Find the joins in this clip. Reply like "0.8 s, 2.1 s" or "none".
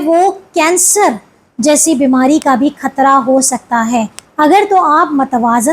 4.2 s